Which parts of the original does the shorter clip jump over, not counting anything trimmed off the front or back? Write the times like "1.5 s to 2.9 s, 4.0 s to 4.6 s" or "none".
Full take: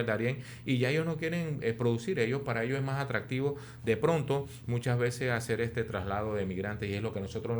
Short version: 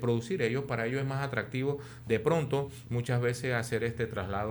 none

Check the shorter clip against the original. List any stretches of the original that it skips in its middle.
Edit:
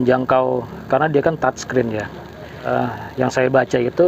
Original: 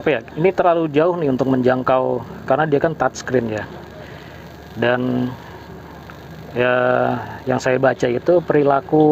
4.3 s to 7.0 s

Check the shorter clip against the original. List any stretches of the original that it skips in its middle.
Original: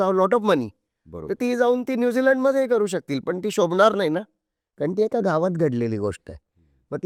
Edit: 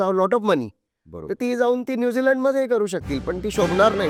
none

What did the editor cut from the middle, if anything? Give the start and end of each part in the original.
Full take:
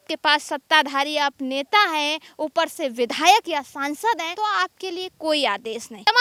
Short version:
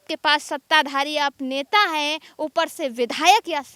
none

